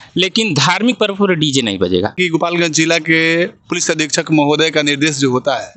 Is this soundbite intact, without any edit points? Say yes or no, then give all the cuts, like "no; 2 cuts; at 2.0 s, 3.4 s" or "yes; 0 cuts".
no; 1 cut; at 2.2 s